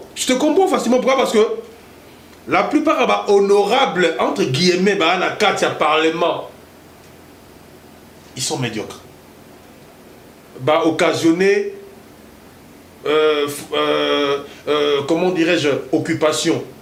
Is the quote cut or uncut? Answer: uncut